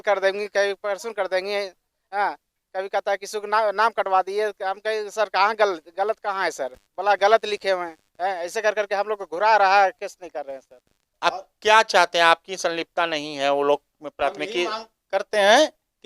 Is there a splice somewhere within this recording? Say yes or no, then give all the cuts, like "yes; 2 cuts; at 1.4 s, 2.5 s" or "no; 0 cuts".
yes; 1 cut; at 11.1 s